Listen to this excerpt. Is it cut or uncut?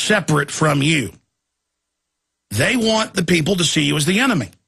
cut